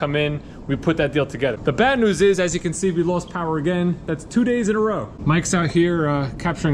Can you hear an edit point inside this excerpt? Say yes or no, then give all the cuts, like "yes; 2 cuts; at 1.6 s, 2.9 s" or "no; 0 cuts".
yes; 2 cuts; at 1.6 s, 5.1 s